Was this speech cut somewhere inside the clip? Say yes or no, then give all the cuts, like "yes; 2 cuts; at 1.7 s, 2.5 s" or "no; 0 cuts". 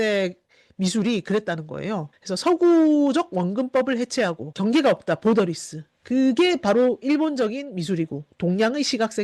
no; 0 cuts